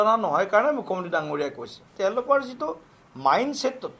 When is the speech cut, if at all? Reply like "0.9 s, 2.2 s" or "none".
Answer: 1.8 s